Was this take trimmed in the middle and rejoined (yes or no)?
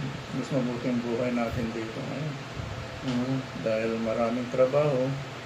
no